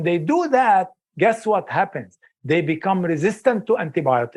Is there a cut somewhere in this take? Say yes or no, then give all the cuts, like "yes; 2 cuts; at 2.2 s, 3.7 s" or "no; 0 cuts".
no; 0 cuts